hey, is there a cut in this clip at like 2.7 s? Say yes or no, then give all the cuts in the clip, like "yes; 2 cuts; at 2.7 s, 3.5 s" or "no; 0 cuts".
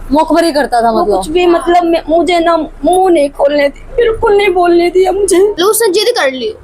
no; 1 cut; at 5.5 s